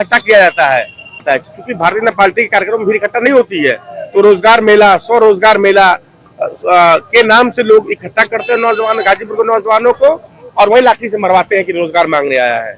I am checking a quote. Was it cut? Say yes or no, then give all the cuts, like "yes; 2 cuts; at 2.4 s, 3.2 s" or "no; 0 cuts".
yes; 1 cut; at 1.2 s